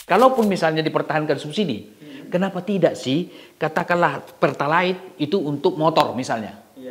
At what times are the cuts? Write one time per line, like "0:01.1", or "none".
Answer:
none